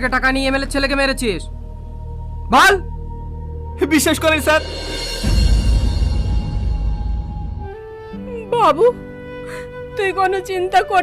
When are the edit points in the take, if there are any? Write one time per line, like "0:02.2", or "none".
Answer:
0:07.8